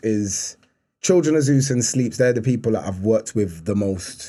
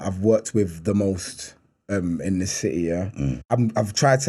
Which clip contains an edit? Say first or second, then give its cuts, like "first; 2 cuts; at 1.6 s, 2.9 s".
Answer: second; 1 cut; at 3.4 s